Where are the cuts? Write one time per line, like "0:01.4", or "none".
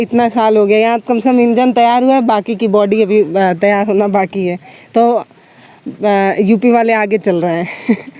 none

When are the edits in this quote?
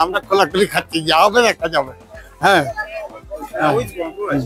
none

